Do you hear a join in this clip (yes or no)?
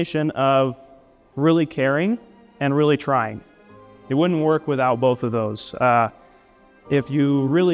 no